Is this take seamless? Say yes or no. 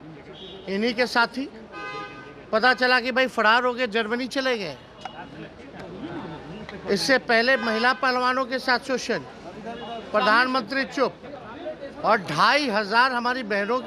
yes